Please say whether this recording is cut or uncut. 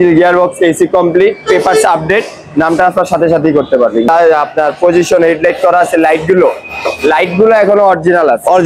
cut